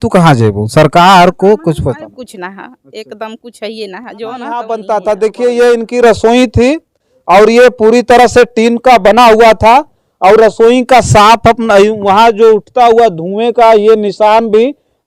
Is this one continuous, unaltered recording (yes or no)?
no